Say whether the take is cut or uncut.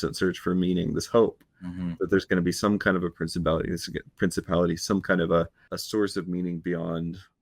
uncut